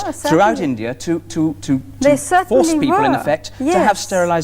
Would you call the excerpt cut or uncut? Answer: uncut